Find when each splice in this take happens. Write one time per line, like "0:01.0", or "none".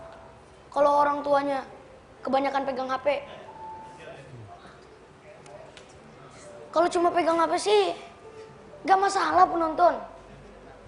0:05.4